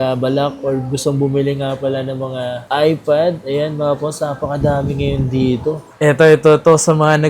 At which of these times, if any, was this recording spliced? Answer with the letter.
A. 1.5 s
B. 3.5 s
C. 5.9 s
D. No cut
C